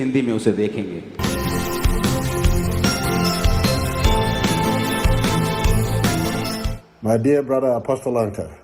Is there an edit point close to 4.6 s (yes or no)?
no